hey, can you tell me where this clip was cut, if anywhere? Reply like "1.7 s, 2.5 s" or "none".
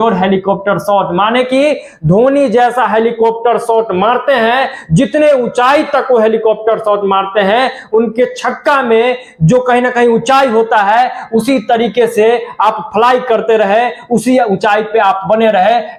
none